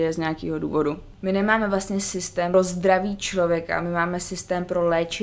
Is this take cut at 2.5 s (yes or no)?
yes